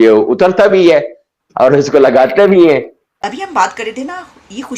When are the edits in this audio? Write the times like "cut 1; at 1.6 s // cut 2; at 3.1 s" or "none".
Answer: cut 1; at 3.2 s